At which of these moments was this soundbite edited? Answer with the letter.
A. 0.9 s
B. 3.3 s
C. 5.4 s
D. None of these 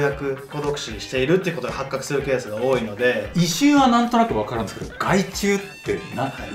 B